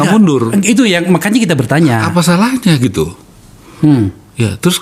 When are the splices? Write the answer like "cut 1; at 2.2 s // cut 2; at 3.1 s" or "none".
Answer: none